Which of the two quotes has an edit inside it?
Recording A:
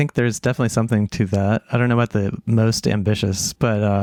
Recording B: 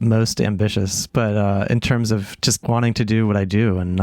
B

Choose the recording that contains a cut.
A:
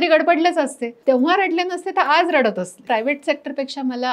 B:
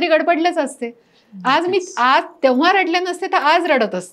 A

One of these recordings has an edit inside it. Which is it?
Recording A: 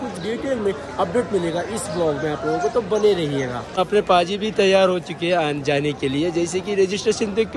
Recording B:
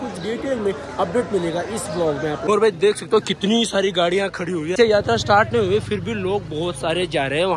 B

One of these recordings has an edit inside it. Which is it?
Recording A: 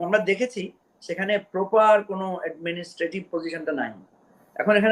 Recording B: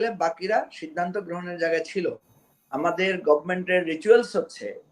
B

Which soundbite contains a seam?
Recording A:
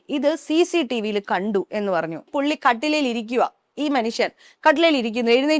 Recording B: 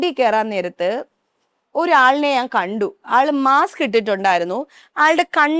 A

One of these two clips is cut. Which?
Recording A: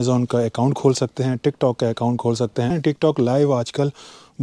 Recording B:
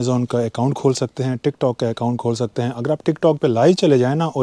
A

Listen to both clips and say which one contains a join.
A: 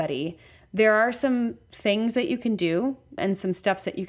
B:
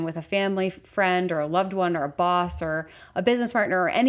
A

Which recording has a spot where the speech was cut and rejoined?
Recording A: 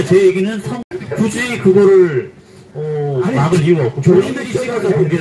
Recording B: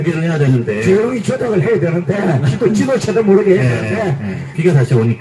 A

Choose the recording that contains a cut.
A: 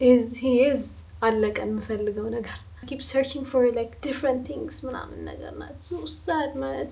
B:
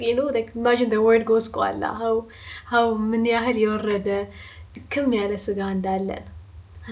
A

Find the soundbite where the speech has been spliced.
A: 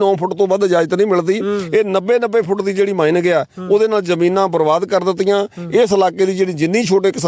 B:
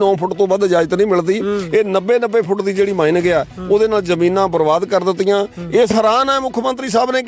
B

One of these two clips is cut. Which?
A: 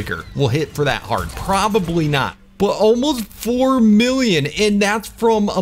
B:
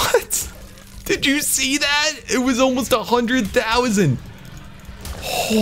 A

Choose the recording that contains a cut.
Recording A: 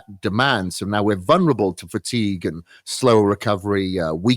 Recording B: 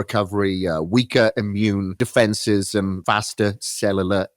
B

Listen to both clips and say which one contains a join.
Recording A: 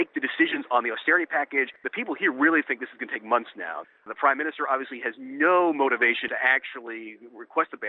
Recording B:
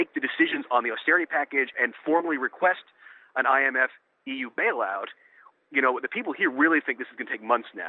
A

